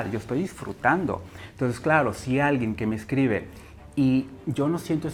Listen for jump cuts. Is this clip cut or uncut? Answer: uncut